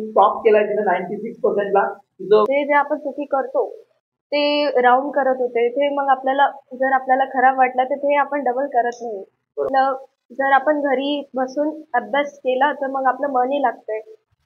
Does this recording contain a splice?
yes; 2 cuts; at 2.5 s, 9.7 s

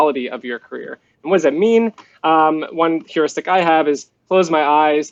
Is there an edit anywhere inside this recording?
no; 0 cuts

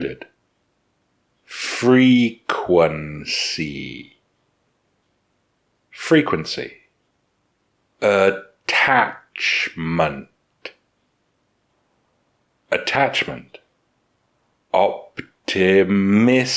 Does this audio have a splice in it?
no; 0 cuts

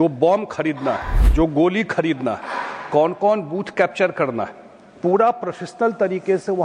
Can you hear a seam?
yes; 1 cut; at 1.2 s

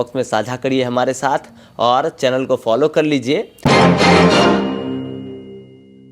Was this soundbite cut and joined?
yes; 1 cut; at 3.5 s

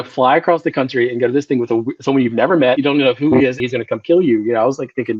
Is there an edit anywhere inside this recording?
yes; 2 cuts; at 2.8 s, 3.6 s

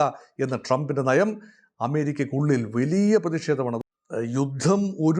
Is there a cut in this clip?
yes; 1 cut; at 3.8 s

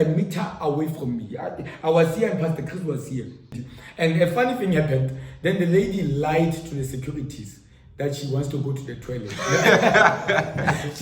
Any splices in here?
yes; 1 cut; at 3.6 s

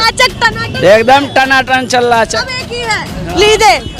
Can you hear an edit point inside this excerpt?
yes; 1 cut; at 2.4 s

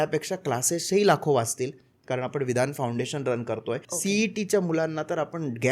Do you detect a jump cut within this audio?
yes; 1 cut; at 3.9 s

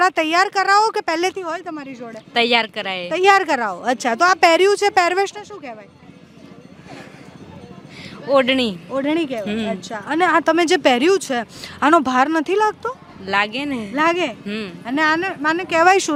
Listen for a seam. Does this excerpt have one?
no; 0 cuts

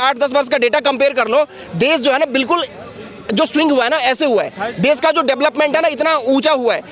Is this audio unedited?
yes; 0 cuts

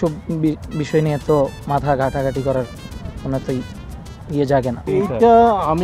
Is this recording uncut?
yes; 0 cuts

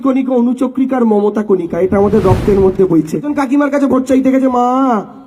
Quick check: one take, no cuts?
no; 1 cut; at 3.3 s

